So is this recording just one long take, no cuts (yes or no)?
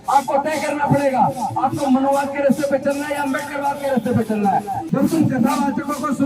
no